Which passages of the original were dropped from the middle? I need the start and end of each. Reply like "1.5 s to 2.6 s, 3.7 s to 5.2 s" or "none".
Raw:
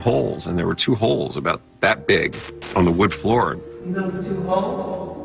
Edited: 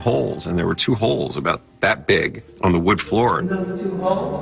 2.4 s to 2.6 s, 3.5 s to 3.9 s